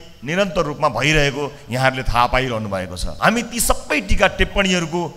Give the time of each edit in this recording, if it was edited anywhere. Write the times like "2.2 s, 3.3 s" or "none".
3.0 s

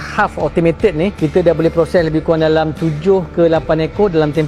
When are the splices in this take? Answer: none

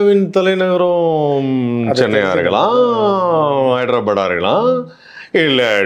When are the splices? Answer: none

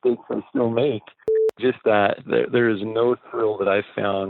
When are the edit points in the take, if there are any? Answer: 1.4 s

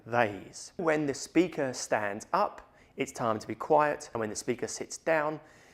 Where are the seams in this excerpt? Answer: 0.8 s, 4.1 s

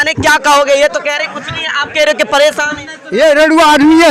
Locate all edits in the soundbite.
3.0 s

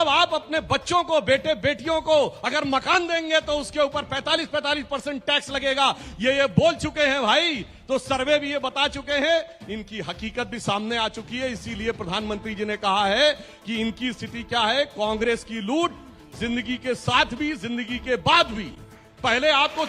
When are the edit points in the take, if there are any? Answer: none

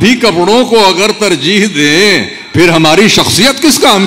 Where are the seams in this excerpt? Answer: none

